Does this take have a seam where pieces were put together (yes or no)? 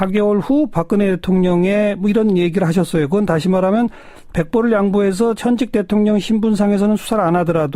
no